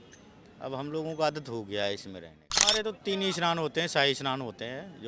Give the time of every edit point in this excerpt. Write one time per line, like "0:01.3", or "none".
0:02.7